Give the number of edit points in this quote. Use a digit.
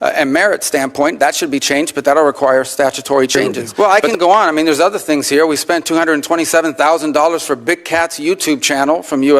1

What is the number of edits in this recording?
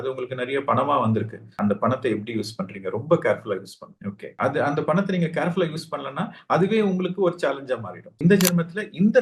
1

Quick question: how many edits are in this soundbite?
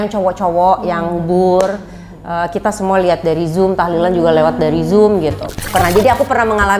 1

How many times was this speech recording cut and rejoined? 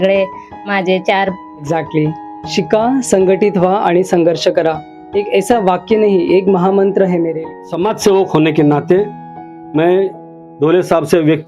2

